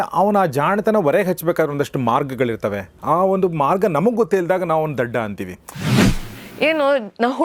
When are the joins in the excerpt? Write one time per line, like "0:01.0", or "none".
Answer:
0:06.1